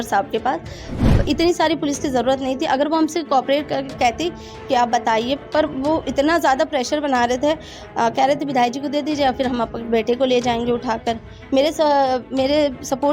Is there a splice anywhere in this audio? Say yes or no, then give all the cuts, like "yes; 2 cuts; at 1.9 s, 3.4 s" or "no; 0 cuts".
yes; 1 cut; at 1.0 s